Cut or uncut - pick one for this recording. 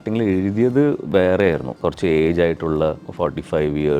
cut